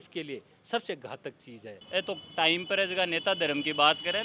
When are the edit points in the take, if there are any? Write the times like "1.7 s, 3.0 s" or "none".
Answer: 1.8 s